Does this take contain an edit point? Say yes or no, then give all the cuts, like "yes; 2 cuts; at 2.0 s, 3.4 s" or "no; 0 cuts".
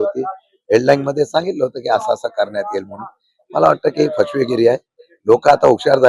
no; 0 cuts